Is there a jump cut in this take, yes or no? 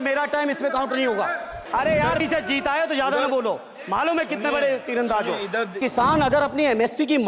yes